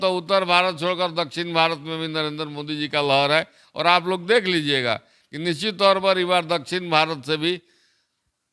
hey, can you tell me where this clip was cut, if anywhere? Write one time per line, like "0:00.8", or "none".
none